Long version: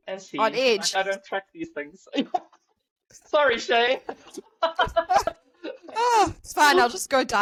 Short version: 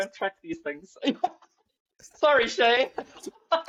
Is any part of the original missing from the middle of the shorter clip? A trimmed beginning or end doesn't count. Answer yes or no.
no